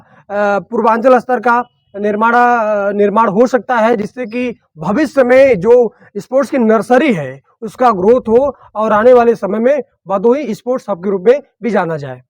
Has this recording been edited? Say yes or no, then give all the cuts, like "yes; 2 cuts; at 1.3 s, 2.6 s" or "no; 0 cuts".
no; 0 cuts